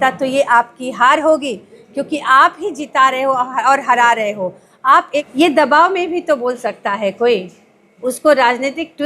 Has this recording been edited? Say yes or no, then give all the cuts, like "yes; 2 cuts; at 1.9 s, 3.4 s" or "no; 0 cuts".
yes; 1 cut; at 5.3 s